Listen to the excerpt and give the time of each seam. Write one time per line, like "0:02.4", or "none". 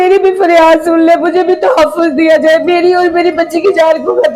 none